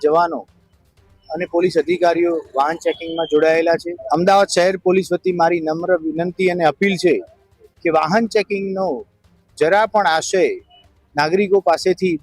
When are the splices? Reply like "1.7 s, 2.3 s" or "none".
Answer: 3.9 s